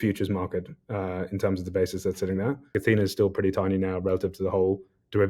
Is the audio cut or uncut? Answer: cut